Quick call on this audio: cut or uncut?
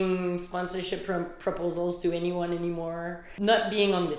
cut